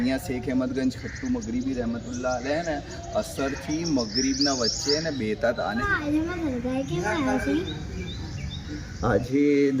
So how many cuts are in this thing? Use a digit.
1